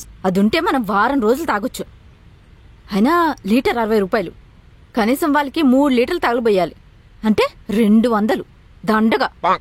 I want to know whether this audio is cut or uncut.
uncut